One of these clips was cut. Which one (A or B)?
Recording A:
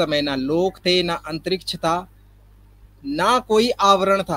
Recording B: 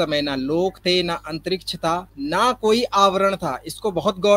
B